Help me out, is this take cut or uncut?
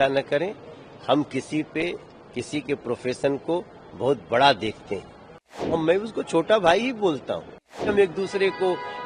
cut